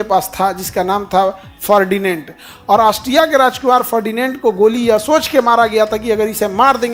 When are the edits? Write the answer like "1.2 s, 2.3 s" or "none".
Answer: none